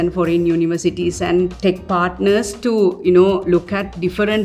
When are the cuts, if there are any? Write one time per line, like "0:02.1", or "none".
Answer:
none

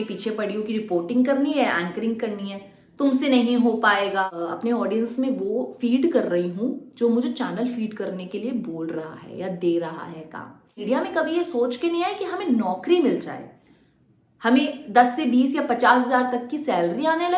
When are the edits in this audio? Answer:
0:04.2
0:10.8

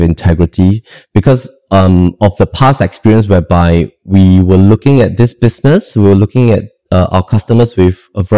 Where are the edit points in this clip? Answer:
none

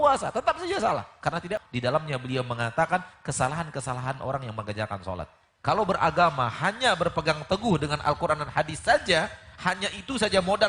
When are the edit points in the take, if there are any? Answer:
0:01.6
0:05.4

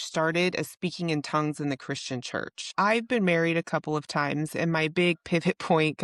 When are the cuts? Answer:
0:02.7

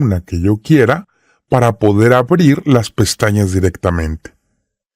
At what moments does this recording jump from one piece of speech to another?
0:03.9

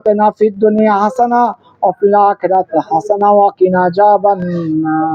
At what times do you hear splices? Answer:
none

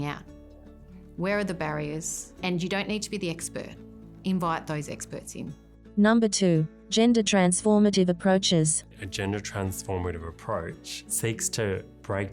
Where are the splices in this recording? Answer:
none

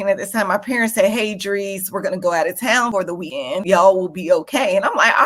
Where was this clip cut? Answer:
0:03.5

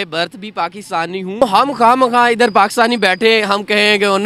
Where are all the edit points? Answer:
0:01.4

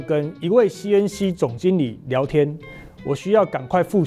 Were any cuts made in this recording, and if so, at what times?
none

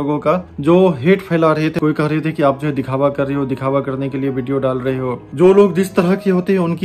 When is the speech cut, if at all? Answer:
0:01.8
0:05.3

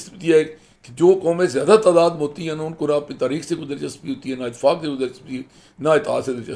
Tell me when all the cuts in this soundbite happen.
none

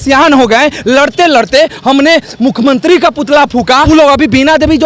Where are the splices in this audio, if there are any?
0:03.9

